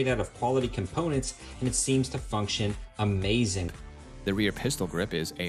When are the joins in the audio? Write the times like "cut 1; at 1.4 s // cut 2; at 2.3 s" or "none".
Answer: none

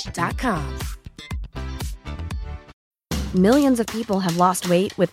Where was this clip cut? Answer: cut 1; at 2.8 s

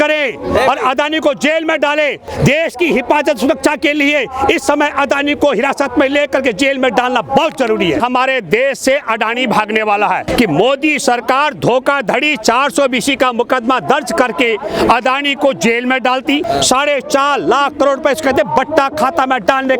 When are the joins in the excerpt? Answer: cut 1; at 2.3 s // cut 2; at 8.0 s // cut 3; at 10.3 s // cut 4; at 16.4 s

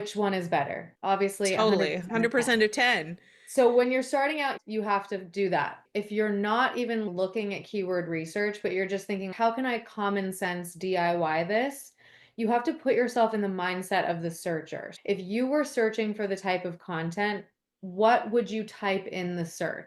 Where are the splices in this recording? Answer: cut 1; at 5.8 s

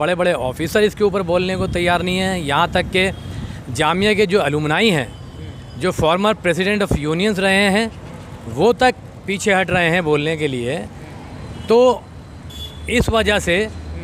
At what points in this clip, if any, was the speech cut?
none

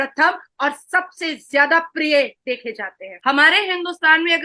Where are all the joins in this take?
cut 1; at 3.1 s

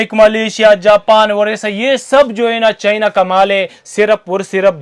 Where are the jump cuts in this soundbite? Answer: cut 1; at 3.8 s

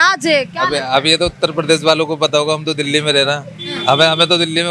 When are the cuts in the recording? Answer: none

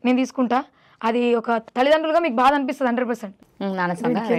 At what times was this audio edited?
cut 1; at 3.5 s

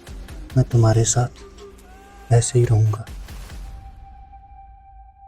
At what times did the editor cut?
cut 1; at 3.0 s

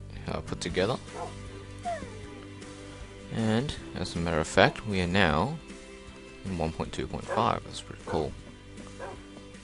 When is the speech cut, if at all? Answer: none

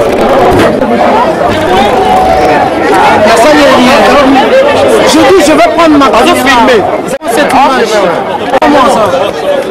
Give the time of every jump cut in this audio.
cut 1; at 7.2 s

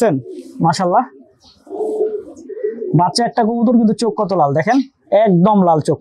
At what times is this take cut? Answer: none

